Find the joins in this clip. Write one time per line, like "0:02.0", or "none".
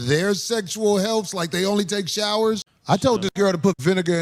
0:02.7

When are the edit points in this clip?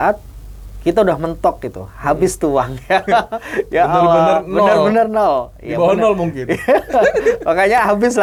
none

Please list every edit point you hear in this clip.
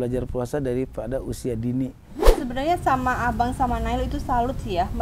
0:02.4

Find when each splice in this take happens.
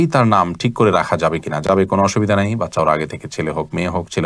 none

